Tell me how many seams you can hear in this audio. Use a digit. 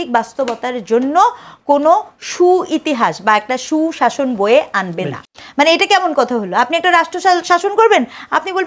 1